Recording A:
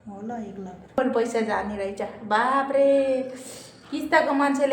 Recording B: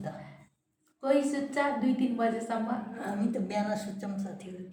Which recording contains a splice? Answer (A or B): A